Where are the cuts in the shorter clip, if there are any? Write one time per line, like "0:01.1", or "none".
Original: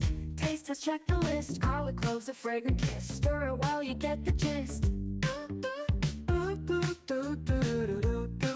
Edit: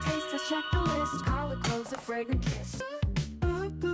0:02.8